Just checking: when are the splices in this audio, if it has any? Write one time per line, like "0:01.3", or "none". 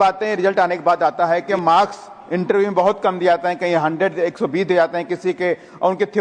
0:01.5